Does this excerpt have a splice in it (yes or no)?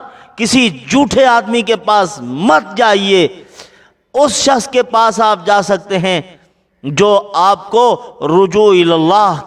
no